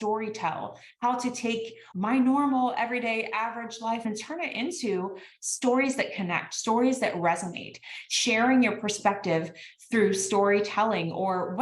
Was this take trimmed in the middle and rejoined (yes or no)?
yes